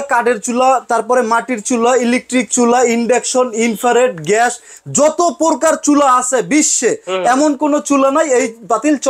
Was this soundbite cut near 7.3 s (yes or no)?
no